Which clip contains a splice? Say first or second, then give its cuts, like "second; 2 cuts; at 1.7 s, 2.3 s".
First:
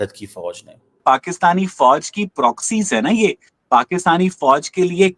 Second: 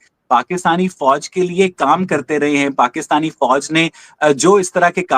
first; 1 cut; at 1.0 s